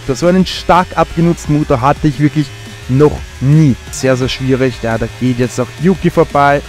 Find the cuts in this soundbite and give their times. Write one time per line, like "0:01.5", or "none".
0:03.9